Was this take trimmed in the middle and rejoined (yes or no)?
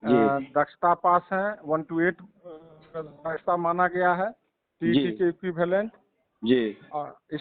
no